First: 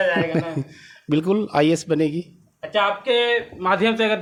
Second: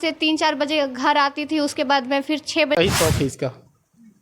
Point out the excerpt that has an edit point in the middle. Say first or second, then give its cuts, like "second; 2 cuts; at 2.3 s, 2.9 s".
second; 1 cut; at 2.8 s